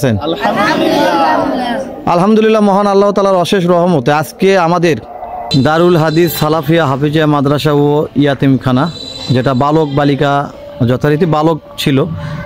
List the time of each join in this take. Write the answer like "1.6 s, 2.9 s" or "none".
5.4 s